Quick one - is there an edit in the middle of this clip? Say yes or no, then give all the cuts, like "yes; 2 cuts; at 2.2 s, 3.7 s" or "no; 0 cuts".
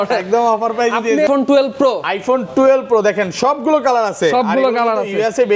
yes; 1 cut; at 1.3 s